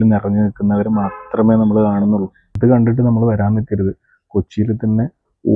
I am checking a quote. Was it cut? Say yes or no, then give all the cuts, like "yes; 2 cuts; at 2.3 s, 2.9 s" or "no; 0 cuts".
yes; 1 cut; at 2.5 s